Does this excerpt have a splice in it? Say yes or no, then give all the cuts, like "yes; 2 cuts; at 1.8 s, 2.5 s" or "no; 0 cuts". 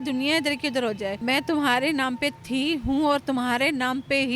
yes; 1 cut; at 1.2 s